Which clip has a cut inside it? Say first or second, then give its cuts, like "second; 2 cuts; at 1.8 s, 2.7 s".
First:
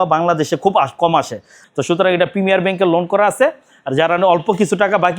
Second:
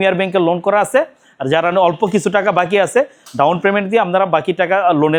first; 1 cut; at 1.6 s